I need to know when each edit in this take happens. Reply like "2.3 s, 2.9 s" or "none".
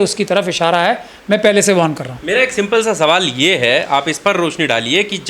none